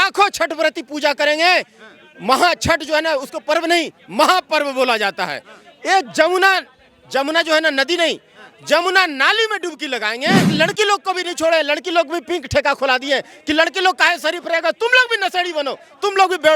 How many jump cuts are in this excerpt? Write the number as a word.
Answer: one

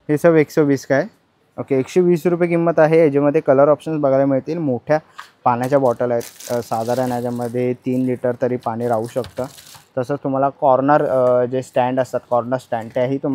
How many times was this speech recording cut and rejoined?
zero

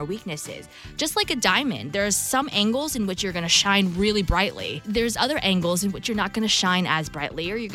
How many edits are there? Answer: one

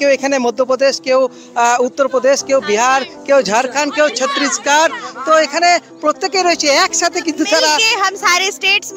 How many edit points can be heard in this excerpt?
one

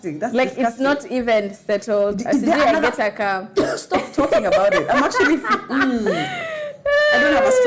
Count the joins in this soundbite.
zero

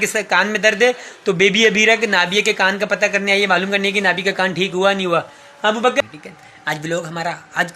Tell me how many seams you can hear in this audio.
one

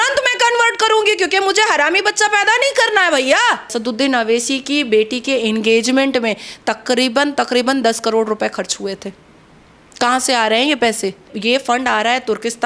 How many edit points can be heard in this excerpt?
two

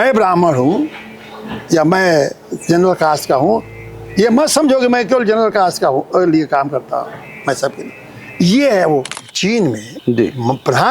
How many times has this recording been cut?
one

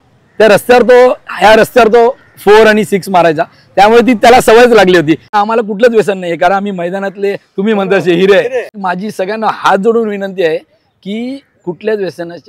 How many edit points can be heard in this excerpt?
two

